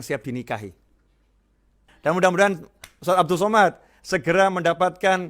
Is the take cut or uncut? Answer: cut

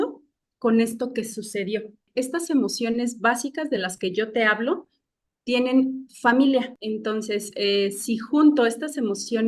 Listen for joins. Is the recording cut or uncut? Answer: cut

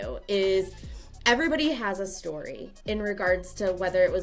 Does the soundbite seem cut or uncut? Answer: uncut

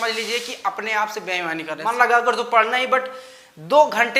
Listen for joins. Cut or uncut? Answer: cut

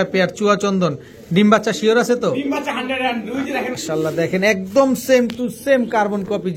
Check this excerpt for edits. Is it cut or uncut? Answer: cut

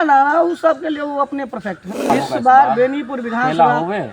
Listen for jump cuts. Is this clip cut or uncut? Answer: cut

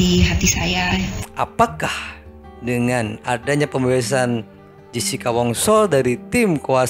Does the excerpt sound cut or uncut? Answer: cut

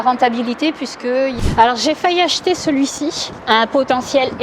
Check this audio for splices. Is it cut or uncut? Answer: cut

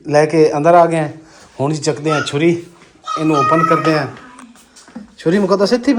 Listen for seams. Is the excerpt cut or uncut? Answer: uncut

